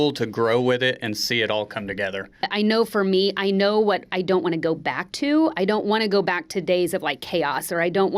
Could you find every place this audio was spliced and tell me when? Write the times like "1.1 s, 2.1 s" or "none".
2.5 s